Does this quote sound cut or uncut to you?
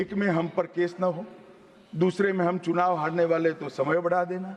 uncut